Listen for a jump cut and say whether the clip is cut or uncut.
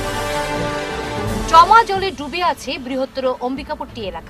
cut